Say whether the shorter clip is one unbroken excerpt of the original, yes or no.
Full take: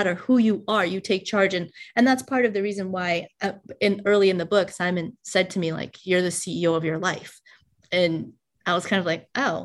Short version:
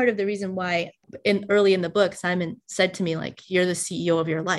no